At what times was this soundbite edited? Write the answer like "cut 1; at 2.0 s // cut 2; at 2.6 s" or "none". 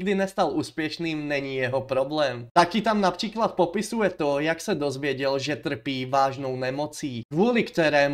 cut 1; at 2.5 s